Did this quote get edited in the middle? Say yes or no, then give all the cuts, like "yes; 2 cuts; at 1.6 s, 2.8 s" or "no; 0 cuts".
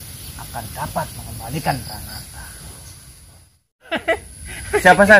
yes; 1 cut; at 3.9 s